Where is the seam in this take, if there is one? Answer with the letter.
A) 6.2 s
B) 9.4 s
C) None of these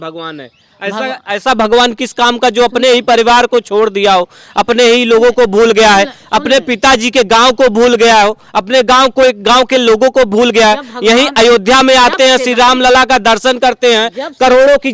C